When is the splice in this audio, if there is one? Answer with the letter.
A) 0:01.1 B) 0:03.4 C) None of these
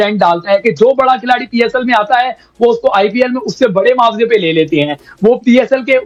C